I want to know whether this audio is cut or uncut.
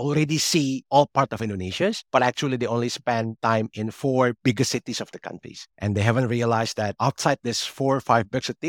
uncut